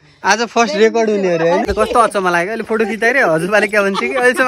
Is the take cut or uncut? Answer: cut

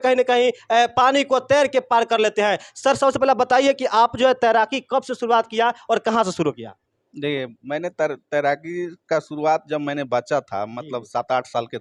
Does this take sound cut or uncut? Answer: uncut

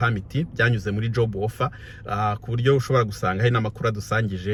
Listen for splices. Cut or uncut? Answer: uncut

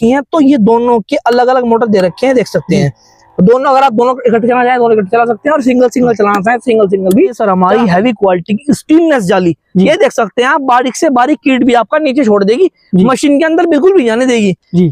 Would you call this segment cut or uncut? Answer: cut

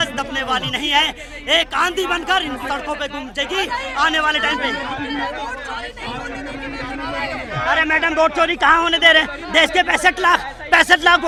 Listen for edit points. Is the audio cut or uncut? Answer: uncut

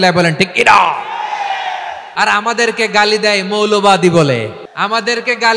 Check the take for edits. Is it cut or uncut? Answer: cut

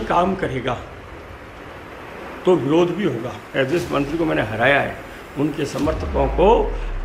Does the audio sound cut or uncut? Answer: cut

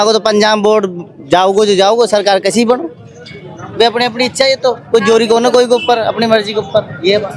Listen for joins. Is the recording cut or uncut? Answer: uncut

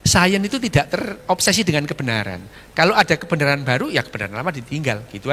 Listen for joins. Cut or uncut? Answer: uncut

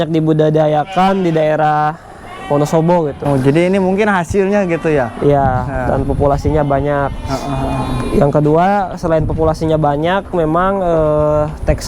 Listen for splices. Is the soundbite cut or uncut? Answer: cut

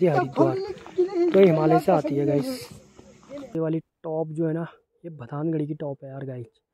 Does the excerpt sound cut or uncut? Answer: cut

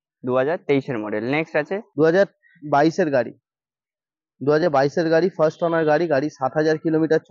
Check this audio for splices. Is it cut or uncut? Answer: cut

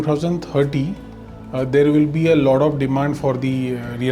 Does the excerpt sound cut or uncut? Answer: uncut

